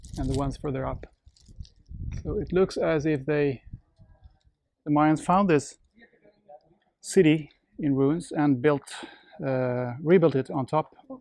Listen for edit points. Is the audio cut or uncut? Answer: cut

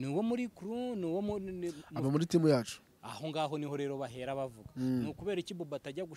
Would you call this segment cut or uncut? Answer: uncut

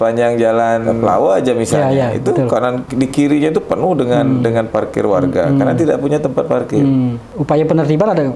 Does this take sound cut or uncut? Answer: cut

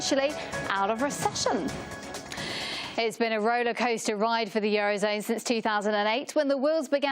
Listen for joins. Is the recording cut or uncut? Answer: cut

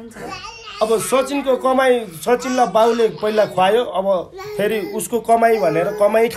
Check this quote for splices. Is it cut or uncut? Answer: uncut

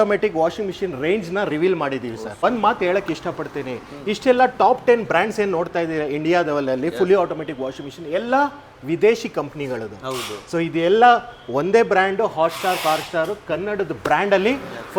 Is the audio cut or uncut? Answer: uncut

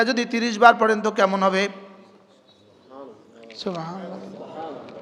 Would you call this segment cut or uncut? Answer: uncut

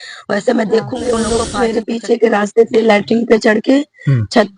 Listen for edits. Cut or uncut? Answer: cut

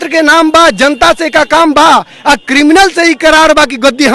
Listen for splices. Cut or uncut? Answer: uncut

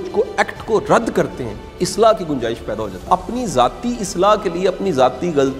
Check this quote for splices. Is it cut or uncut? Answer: cut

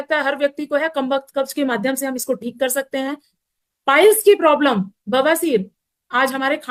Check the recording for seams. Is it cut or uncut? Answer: uncut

